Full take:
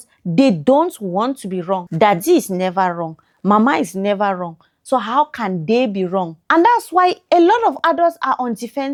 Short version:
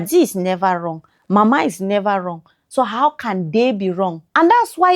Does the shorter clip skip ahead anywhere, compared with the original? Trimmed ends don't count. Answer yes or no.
no